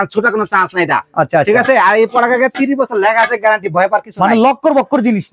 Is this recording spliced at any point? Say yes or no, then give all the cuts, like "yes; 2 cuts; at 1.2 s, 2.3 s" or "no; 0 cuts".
no; 0 cuts